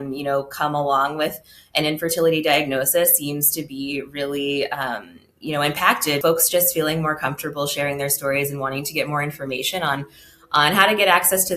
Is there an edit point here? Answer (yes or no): yes